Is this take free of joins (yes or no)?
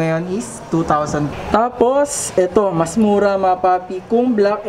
no